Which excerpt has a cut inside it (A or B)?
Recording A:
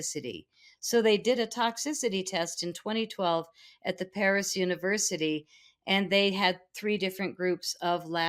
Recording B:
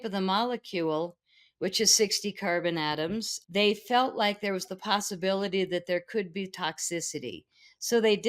B